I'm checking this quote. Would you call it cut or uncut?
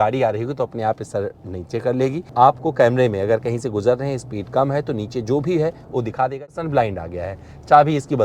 cut